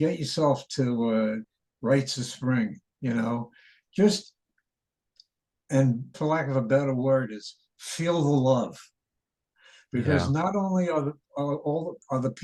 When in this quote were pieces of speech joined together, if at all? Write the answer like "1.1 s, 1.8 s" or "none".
1.5 s, 6.2 s